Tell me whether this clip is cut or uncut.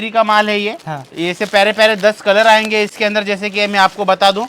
uncut